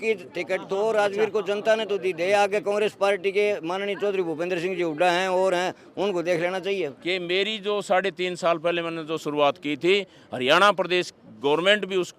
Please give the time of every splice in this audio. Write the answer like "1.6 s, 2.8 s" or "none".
7.0 s